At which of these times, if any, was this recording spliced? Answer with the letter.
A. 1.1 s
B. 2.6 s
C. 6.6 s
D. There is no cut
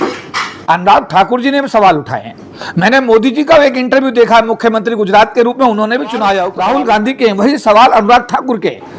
C